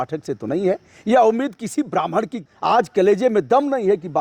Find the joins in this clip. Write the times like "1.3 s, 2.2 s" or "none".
2.4 s

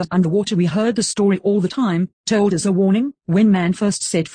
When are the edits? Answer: 0.9 s

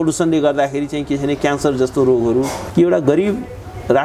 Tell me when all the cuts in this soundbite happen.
2.6 s

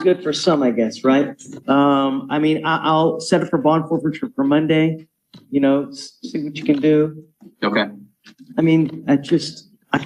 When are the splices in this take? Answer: none

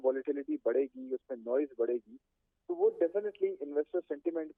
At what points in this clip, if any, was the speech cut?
none

